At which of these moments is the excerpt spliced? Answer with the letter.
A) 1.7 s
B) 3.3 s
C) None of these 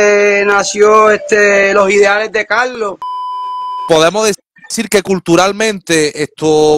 B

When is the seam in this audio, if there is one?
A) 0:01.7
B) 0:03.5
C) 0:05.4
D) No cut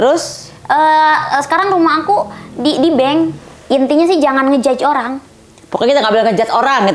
B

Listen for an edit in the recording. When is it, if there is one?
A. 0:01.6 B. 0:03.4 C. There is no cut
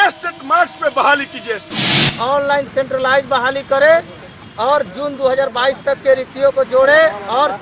A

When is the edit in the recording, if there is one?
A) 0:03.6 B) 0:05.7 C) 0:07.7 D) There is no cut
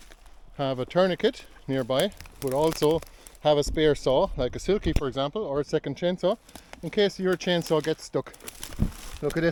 D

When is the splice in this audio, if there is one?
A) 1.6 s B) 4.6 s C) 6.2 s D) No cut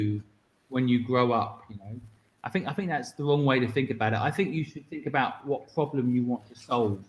D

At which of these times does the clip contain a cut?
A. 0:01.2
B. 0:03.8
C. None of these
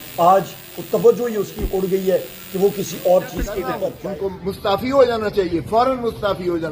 B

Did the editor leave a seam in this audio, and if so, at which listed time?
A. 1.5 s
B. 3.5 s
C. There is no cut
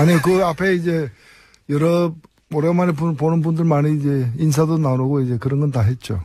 C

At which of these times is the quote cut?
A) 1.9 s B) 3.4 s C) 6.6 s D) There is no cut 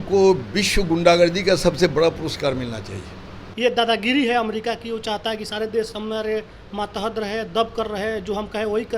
B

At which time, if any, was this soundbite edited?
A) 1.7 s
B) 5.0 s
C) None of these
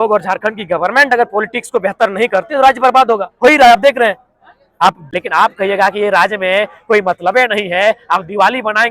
B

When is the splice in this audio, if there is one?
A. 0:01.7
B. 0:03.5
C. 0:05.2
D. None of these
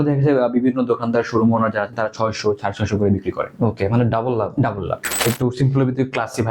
C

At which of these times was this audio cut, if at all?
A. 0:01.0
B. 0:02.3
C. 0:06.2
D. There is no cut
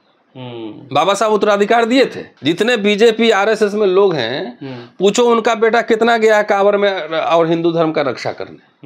B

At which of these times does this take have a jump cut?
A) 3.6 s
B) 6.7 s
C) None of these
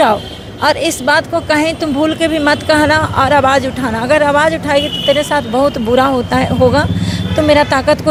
C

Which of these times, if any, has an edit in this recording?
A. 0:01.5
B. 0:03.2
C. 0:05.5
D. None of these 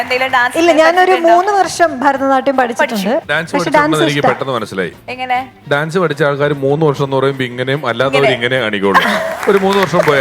B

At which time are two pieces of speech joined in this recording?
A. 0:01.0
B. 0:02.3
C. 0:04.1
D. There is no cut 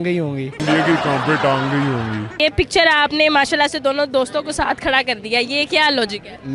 B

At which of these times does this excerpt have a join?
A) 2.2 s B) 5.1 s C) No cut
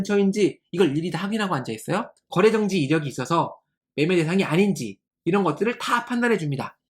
A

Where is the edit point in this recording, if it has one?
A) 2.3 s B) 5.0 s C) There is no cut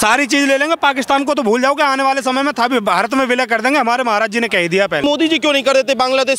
B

